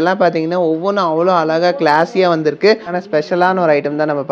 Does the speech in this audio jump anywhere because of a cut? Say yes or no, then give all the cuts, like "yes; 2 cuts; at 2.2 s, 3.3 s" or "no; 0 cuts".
yes; 1 cut; at 2.9 s